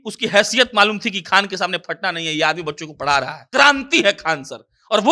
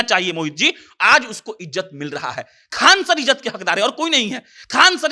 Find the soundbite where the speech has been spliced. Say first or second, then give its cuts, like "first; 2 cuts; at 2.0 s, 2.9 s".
first; 1 cut; at 3.4 s